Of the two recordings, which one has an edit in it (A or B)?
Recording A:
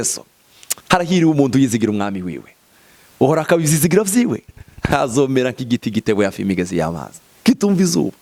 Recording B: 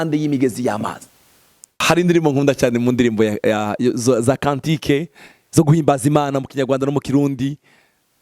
B